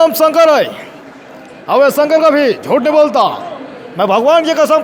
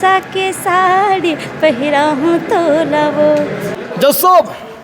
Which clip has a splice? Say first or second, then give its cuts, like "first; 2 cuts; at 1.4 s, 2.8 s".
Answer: second; 1 cut; at 3.6 s